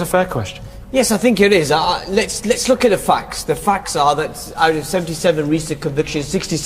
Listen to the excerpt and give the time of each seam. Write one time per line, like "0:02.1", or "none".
0:01.8